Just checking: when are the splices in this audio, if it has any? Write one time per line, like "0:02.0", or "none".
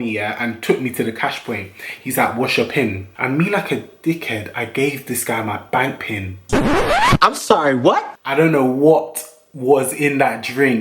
0:03.1
0:08.2

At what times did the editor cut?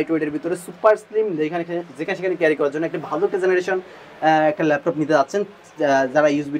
none

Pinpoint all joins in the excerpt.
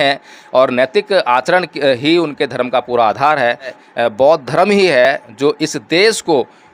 0:03.8

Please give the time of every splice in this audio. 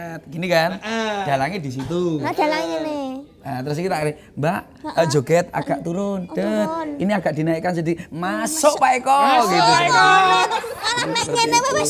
none

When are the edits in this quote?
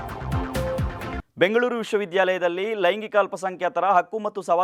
0:01.2

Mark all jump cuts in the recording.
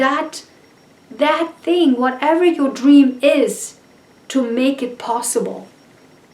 none

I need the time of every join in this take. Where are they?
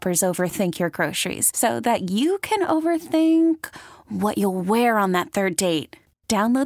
none

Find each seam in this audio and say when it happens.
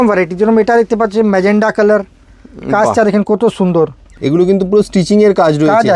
0:04.1

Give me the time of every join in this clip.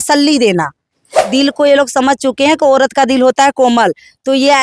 0:01.3

